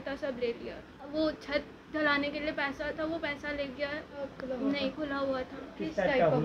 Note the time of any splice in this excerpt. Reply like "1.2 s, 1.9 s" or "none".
1.1 s, 4.3 s